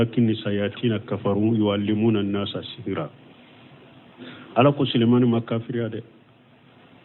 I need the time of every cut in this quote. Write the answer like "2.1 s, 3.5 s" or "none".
1.1 s